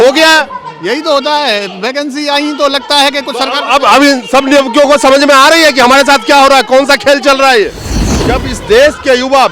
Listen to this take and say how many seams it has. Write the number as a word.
one